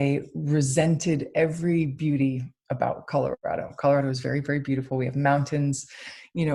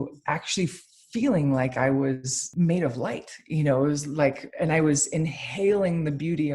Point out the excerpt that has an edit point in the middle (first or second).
second